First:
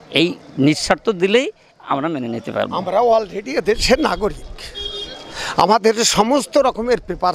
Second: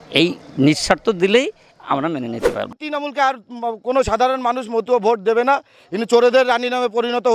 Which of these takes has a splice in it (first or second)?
second